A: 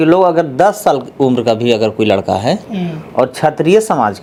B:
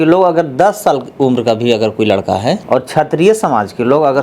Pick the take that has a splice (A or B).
B